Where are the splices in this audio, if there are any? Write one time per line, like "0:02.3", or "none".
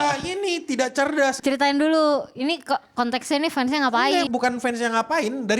0:01.4
0:04.3